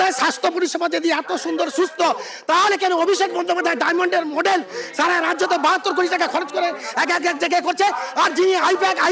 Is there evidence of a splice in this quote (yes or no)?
no